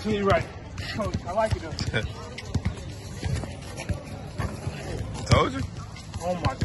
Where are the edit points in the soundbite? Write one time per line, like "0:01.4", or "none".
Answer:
0:00.9